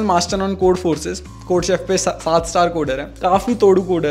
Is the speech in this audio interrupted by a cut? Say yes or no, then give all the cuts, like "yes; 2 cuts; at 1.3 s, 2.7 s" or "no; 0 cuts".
yes; 1 cut; at 3.1 s